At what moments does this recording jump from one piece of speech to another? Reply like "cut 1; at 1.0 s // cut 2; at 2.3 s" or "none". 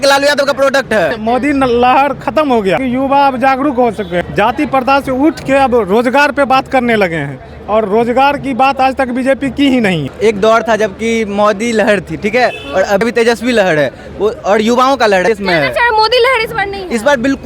cut 1; at 1.1 s // cut 2; at 2.8 s // cut 3; at 4.2 s // cut 4; at 10.1 s // cut 5; at 13.0 s // cut 6; at 15.3 s